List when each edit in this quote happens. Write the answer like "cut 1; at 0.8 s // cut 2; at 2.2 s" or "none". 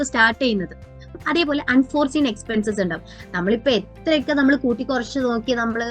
cut 1; at 1.2 s